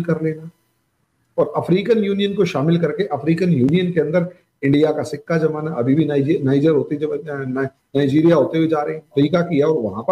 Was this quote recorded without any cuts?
no; 1 cut; at 9.1 s

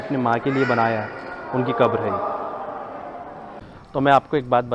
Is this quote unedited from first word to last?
no; 1 cut; at 3.6 s

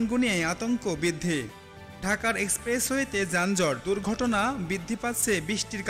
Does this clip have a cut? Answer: no; 0 cuts

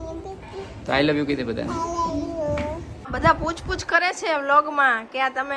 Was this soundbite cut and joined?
yes; 1 cut; at 3.1 s

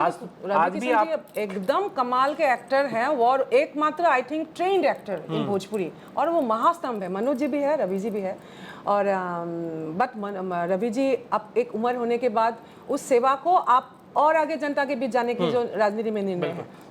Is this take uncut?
yes; 0 cuts

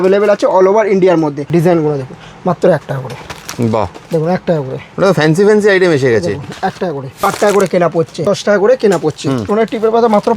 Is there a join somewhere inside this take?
yes; 4 cuts; at 1.4 s, 7.2 s, 8.2 s, 9.4 s

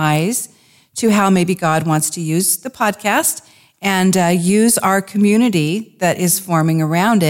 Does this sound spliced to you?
no; 0 cuts

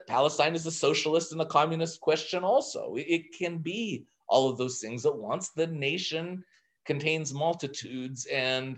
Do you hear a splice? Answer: no; 0 cuts

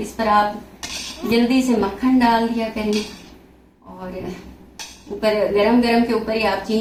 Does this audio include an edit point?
no; 0 cuts

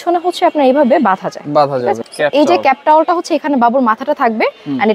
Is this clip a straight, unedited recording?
no; 1 cut; at 2.1 s

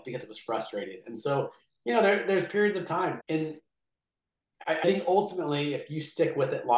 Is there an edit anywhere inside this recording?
yes; 1 cut; at 3.2 s

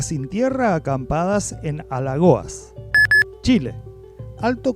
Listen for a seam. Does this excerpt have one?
yes; 1 cut; at 2.8 s

